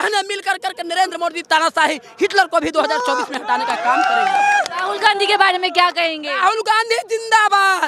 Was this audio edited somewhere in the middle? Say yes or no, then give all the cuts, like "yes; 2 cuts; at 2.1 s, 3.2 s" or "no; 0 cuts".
no; 0 cuts